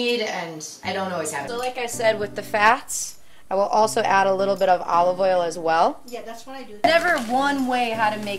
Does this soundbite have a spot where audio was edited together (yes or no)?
yes